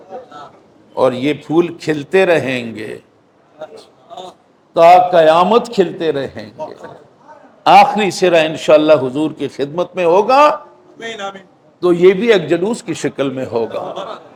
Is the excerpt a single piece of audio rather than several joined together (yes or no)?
yes